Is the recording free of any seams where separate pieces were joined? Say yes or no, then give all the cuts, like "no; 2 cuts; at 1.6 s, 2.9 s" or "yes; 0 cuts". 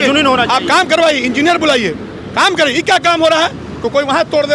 yes; 0 cuts